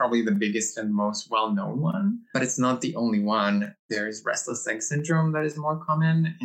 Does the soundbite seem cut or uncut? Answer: cut